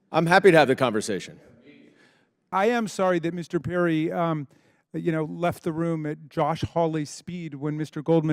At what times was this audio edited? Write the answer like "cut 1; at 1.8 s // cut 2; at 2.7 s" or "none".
cut 1; at 2.5 s